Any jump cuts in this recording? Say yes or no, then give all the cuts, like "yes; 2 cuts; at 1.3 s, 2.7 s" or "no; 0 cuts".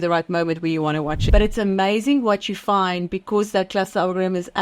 yes; 1 cut; at 1.2 s